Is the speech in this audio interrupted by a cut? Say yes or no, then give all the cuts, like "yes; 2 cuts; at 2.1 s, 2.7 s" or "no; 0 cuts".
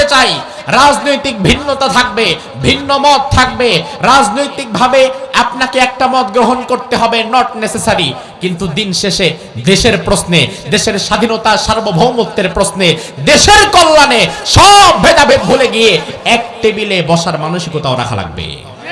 no; 0 cuts